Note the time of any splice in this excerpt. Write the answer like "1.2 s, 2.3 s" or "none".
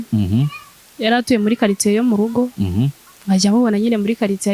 3.1 s

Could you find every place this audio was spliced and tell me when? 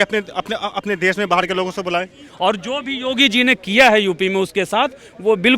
2.2 s

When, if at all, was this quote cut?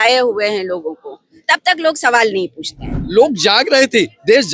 3.0 s

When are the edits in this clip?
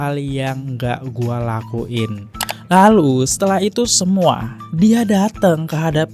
2.3 s

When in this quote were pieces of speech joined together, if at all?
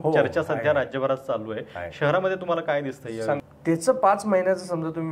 3.5 s

